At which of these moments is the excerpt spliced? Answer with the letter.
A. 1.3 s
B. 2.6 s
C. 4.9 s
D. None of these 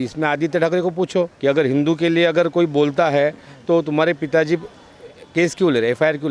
A